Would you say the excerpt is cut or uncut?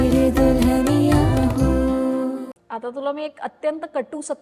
cut